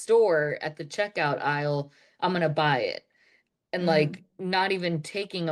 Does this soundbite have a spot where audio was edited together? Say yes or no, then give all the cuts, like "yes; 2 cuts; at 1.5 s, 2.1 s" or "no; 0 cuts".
no; 0 cuts